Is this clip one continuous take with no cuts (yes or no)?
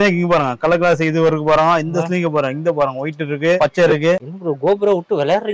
yes